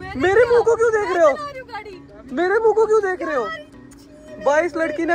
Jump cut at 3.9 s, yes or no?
no